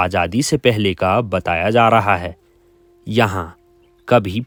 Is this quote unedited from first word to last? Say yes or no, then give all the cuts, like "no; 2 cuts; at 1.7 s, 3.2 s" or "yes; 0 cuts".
yes; 0 cuts